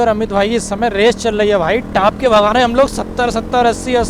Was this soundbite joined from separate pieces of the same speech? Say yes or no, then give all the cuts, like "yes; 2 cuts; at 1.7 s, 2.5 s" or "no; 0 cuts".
no; 0 cuts